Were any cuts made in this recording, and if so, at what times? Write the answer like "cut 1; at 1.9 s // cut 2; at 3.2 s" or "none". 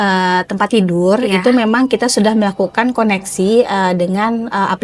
none